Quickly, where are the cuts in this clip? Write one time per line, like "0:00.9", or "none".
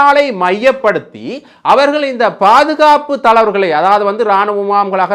none